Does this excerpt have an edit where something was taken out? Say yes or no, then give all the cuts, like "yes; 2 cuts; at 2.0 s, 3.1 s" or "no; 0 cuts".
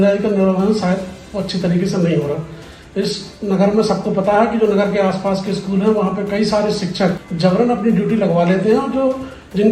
yes; 1 cut; at 7.3 s